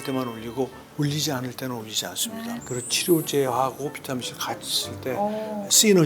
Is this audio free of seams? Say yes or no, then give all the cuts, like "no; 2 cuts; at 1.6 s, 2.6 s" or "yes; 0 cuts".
no; 1 cut; at 2.6 s